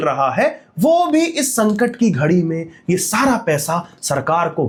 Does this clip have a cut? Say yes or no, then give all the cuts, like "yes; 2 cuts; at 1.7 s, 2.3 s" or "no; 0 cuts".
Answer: no; 0 cuts